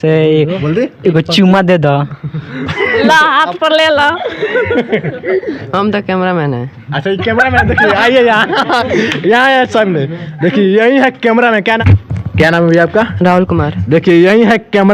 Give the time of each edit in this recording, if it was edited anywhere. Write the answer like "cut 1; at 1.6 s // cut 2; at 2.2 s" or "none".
none